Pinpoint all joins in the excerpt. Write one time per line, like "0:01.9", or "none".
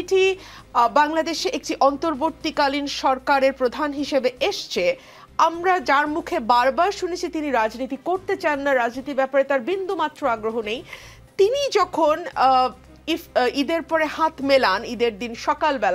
none